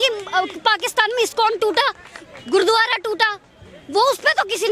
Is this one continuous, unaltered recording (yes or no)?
yes